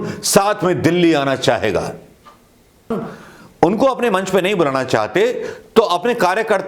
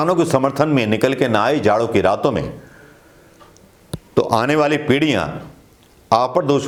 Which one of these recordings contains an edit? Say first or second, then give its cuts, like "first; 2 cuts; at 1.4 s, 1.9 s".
first; 1 cut; at 2.9 s